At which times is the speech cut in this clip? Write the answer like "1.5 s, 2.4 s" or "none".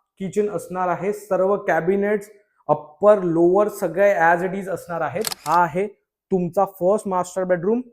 5.4 s